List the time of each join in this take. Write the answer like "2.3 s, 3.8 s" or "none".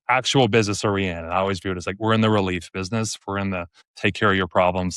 none